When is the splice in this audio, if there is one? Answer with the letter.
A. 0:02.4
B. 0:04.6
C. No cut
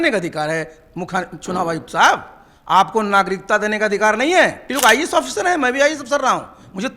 B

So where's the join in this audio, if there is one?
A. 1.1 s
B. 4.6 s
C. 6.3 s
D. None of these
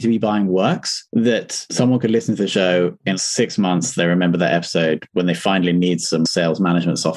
C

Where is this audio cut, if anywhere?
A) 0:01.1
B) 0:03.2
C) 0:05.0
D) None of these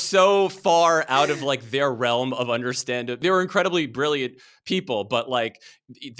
B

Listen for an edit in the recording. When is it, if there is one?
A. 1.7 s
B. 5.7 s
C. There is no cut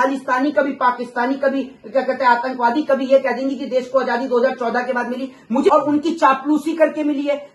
B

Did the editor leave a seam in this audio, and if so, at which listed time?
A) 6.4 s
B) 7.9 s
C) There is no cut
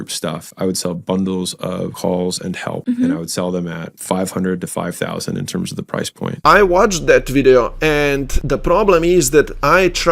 A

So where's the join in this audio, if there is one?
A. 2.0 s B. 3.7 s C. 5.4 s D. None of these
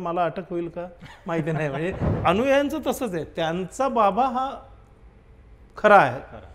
A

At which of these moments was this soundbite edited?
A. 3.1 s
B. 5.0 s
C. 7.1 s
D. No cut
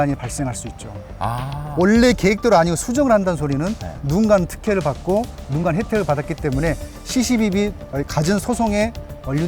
D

